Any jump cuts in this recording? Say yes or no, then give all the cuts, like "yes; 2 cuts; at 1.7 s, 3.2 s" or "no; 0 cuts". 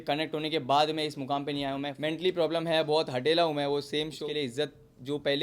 yes; 2 cuts; at 1.9 s, 4.2 s